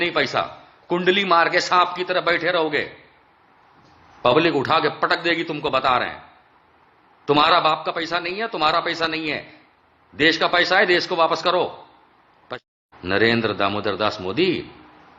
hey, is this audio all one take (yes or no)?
no